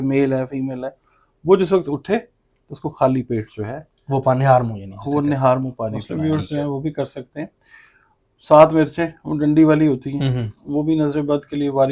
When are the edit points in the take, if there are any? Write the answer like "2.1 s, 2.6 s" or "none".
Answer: 6.0 s